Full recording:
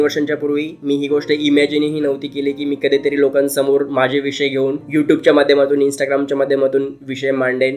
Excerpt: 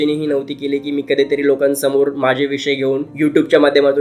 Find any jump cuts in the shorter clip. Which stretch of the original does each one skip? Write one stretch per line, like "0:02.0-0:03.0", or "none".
none